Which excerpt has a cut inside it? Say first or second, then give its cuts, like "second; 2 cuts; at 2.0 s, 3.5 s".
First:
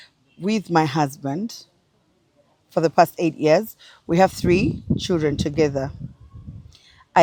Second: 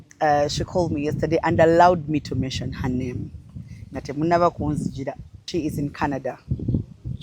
second; 1 cut; at 5.4 s